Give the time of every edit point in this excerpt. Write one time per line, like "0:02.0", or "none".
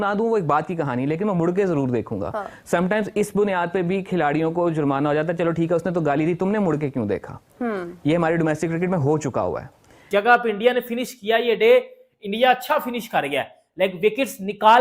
0:10.0